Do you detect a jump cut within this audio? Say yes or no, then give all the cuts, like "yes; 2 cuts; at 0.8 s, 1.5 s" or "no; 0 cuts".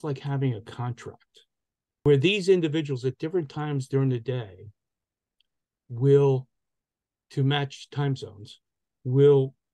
yes; 1 cut; at 2.1 s